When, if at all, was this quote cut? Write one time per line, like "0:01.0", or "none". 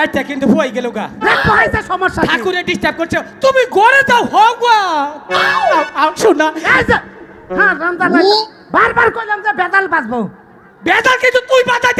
none